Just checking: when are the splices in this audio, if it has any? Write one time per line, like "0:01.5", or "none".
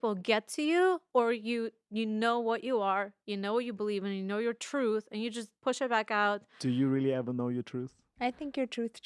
0:05.5
0:08.0